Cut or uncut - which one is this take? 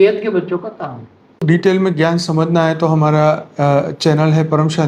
cut